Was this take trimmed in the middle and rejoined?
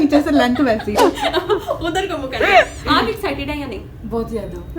yes; 1 cut; at 0.9 s

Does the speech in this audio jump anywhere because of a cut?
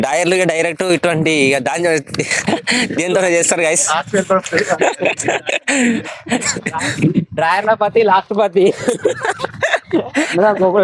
no; 0 cuts

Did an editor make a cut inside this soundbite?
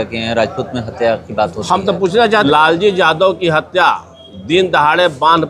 yes; 1 cut; at 2.4 s

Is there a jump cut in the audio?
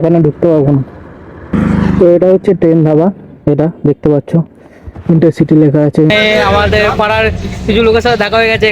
yes; 2 cuts; at 1.5 s, 6.1 s

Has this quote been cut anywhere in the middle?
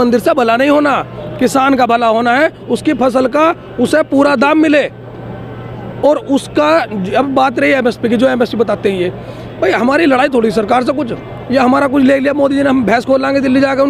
no; 0 cuts

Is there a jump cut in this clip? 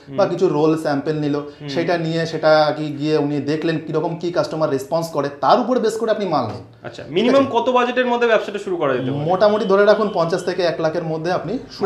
no; 0 cuts

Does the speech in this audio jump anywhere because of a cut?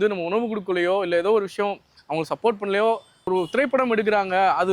yes; 1 cut; at 3.3 s

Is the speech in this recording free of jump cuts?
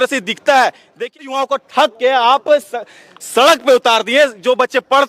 no; 1 cut; at 1.2 s

